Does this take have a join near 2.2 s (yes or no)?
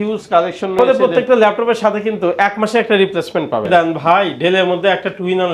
no